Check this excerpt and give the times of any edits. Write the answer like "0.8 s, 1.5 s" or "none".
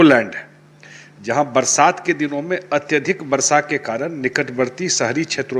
none